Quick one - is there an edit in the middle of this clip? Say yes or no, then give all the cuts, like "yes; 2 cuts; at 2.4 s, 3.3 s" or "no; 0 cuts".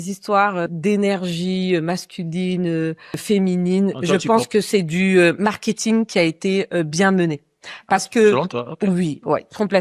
no; 0 cuts